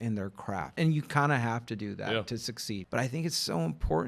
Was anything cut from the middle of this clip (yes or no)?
yes